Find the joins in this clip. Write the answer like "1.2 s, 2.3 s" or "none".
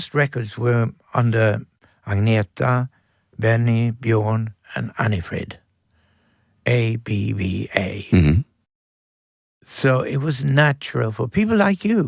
none